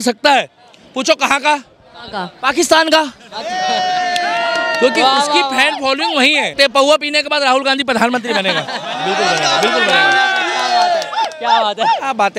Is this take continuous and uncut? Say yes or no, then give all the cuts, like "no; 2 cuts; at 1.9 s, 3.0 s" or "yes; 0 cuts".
no; 1 cut; at 6.5 s